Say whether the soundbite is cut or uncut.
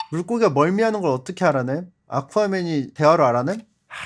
uncut